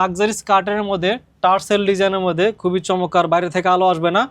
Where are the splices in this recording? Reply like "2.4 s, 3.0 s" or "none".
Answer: none